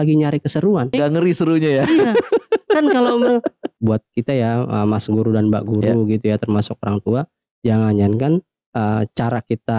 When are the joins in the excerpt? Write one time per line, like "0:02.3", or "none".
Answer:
0:00.9
0:03.7